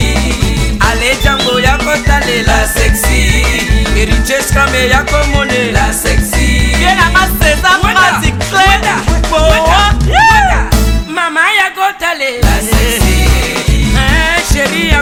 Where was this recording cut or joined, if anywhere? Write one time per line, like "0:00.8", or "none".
none